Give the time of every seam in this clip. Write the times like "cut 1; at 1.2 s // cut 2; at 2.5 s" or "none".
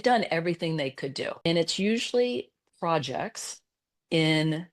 cut 1; at 1.4 s